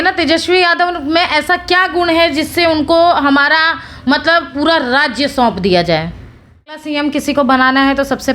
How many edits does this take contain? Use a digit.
1